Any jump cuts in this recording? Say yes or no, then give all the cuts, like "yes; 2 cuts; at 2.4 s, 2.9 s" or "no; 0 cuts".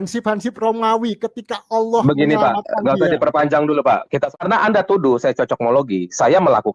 yes; 1 cut; at 4.3 s